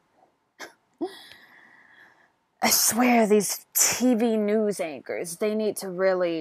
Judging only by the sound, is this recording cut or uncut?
cut